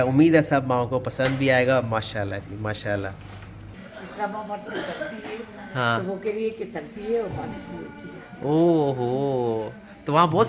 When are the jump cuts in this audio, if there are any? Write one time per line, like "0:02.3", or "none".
0:03.7